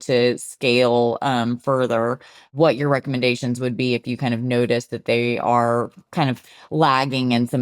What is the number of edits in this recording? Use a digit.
1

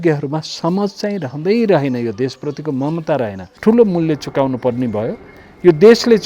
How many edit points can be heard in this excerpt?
1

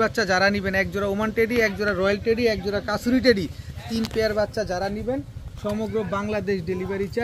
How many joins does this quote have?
0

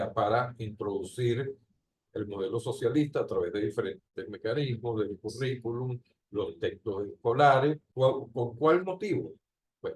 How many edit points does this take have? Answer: 1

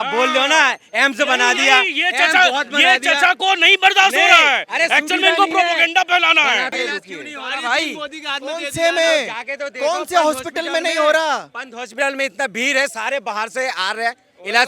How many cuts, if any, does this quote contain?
1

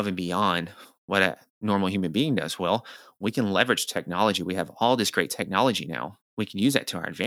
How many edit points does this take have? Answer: 1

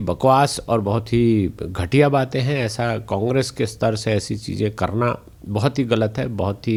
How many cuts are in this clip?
0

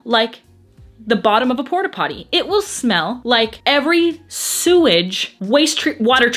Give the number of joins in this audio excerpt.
0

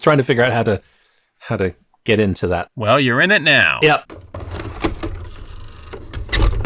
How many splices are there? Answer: 1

